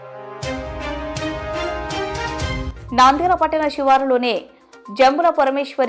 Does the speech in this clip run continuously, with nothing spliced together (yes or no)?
yes